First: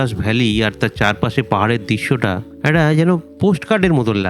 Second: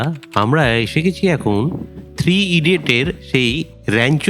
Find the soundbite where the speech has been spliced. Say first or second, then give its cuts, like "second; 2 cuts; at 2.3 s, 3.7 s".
first; 2 cuts; at 2.5 s, 3.3 s